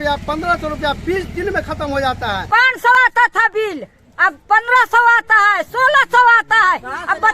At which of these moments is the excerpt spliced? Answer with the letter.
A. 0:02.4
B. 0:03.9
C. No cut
A